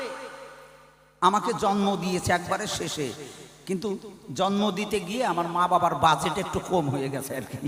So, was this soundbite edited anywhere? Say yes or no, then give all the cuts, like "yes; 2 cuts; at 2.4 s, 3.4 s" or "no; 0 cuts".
no; 0 cuts